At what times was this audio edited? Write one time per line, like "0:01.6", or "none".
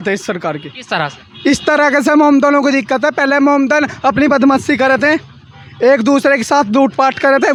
none